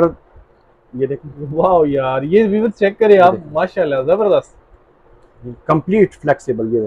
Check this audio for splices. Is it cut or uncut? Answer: uncut